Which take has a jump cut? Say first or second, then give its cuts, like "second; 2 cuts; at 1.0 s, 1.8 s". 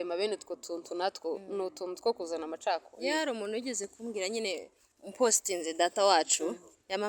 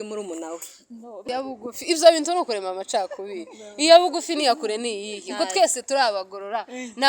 second; 1 cut; at 1.2 s